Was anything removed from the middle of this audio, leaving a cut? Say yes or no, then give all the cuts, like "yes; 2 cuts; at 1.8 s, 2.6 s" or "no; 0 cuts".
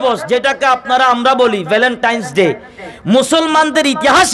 no; 0 cuts